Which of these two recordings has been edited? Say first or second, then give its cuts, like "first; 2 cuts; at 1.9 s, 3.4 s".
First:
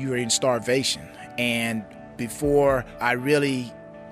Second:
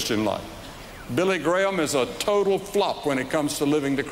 first; 2 cuts; at 1.9 s, 2.9 s